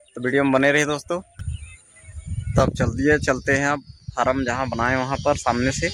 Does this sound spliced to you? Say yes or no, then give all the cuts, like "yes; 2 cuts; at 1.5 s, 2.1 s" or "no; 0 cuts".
no; 0 cuts